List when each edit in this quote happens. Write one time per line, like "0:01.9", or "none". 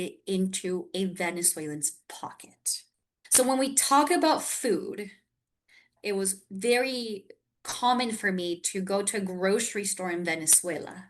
0:05.9